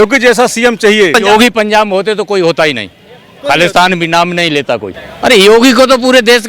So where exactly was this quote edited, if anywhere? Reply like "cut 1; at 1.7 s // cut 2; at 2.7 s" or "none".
cut 1; at 1.1 s // cut 2; at 4.9 s

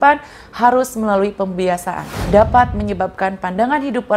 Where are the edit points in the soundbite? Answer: cut 1; at 2.1 s

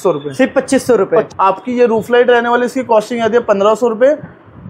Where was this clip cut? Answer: cut 1; at 1.3 s

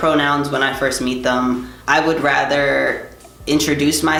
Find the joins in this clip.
none

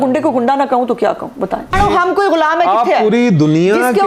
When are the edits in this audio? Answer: cut 1; at 1.7 s

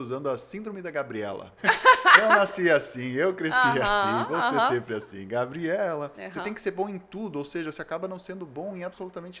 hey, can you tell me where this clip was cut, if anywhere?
cut 1; at 1.5 s // cut 2; at 6.2 s

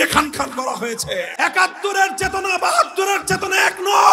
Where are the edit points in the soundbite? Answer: cut 1; at 1.3 s

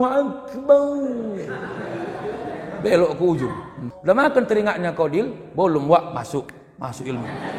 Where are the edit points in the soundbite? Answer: cut 1; at 3.8 s

